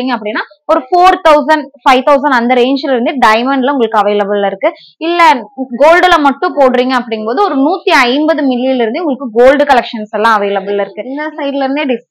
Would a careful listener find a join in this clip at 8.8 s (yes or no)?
no